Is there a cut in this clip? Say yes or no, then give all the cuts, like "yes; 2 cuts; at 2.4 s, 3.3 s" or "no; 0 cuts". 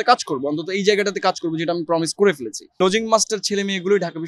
yes; 1 cut; at 2.8 s